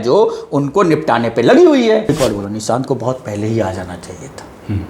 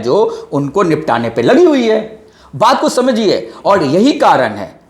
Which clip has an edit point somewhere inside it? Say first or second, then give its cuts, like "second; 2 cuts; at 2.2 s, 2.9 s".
first; 1 cut; at 2.1 s